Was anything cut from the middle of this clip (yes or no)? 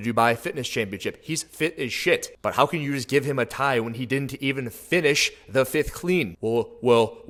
no